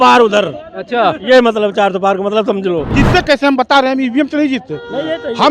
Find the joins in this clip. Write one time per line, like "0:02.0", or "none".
0:02.9